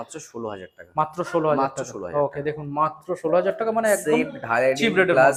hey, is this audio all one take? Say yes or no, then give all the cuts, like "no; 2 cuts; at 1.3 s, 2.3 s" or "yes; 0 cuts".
yes; 0 cuts